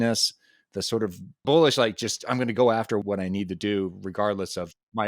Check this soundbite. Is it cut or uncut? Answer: cut